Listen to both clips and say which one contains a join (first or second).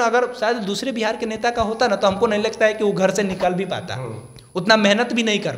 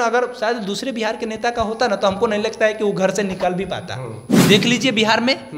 second